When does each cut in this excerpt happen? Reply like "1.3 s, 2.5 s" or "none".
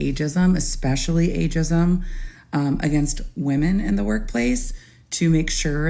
none

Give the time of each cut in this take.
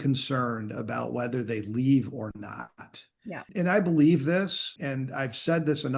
3.5 s, 4.7 s

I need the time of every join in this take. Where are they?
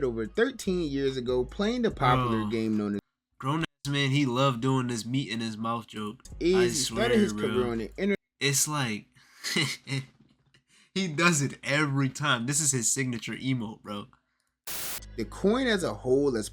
14.9 s

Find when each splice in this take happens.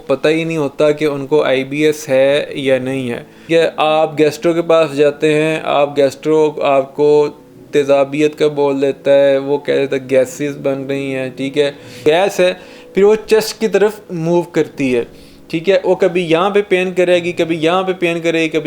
3.3 s, 12.0 s

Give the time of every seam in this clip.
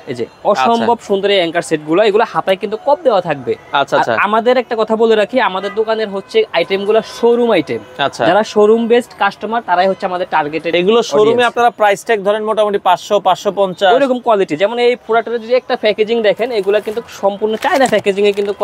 none

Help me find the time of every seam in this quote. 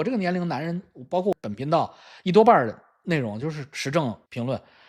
1.3 s

